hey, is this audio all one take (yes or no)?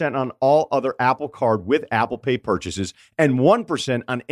yes